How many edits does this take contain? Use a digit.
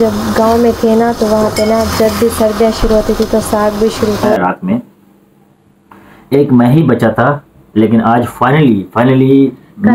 1